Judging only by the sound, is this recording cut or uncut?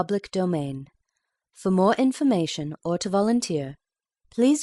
uncut